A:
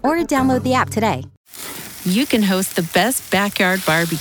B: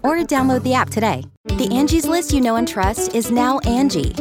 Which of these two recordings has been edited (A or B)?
A